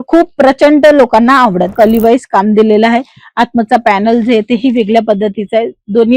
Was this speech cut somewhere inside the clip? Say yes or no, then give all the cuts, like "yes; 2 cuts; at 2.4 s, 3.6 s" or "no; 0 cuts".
yes; 1 cut; at 1.7 s